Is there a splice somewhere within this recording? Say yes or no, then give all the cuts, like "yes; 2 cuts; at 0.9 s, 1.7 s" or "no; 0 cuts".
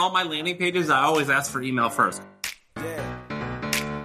yes; 1 cut; at 2.2 s